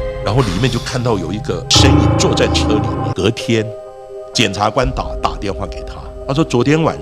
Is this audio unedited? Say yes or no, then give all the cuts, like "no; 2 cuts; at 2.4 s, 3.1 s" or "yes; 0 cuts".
no; 1 cut; at 3.0 s